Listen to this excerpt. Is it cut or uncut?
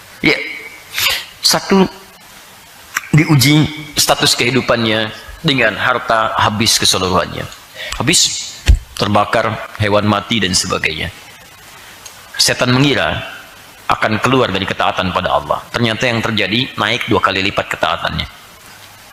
uncut